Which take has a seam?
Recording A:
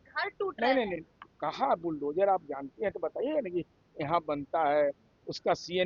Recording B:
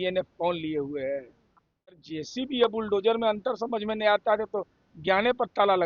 B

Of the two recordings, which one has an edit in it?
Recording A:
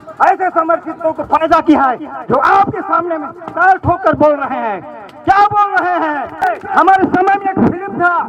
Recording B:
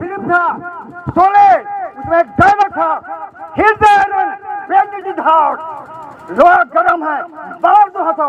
A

